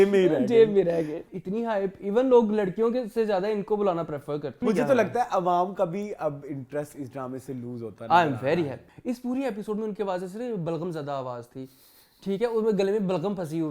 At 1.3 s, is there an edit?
yes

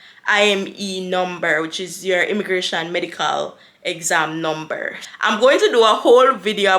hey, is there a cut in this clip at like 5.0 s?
yes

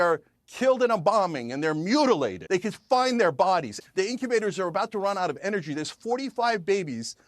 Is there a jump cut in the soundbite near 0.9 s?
no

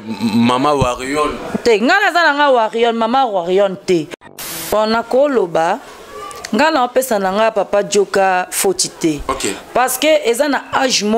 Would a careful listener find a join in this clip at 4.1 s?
yes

